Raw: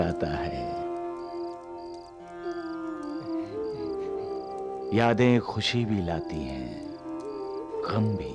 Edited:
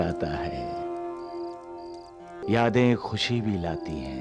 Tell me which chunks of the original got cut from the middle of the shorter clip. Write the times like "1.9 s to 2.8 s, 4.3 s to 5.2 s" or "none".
2.4 s to 4.8 s